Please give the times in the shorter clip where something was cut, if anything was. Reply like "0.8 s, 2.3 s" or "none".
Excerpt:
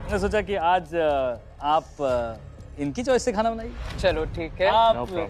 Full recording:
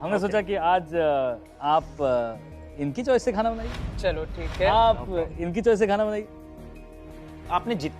none